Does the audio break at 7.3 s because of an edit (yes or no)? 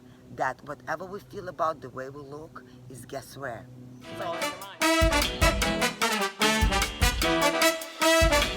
no